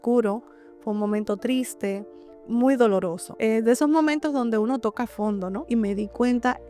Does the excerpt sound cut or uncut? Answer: cut